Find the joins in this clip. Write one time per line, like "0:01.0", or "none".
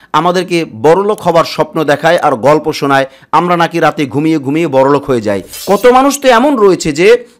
0:05.5